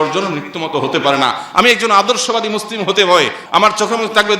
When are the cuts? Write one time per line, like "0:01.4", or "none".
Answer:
0:03.4